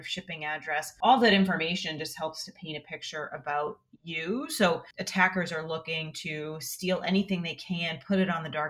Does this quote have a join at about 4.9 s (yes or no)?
yes